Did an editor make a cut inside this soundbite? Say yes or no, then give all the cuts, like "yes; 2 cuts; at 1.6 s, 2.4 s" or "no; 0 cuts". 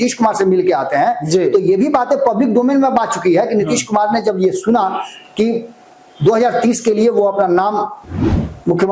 no; 0 cuts